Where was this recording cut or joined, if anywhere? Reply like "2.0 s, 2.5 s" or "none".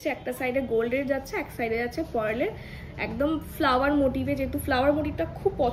none